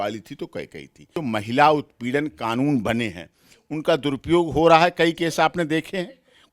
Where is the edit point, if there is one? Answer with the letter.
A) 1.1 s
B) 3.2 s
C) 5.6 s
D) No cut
A